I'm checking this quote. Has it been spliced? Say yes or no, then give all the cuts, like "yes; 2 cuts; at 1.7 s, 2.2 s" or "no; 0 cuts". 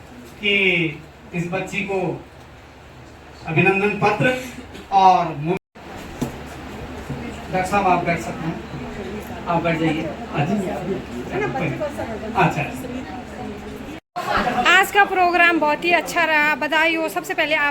yes; 2 cuts; at 5.6 s, 14.0 s